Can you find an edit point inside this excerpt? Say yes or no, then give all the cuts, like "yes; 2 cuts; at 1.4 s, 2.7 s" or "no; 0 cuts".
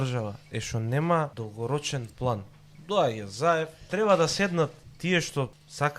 yes; 3 cuts; at 1.4 s, 3.9 s, 5.1 s